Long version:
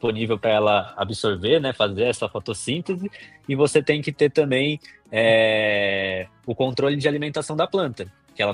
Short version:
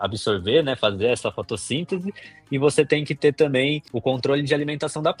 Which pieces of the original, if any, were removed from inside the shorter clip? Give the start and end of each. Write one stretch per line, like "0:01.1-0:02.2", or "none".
0:04.8-0:06.4